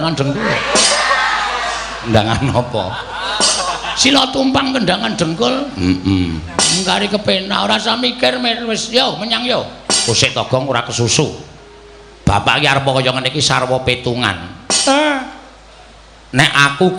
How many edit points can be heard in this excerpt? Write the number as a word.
zero